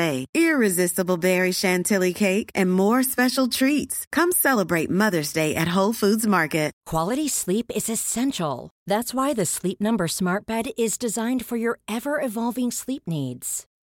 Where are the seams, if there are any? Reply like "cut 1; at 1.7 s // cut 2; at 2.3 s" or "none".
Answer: cut 1; at 6.8 s